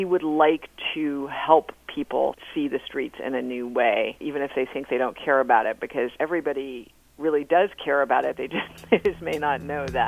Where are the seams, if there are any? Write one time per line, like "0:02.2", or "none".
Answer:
0:02.4
0:04.2
0:06.1